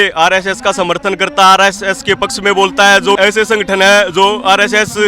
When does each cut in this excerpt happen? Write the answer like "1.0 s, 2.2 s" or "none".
3.2 s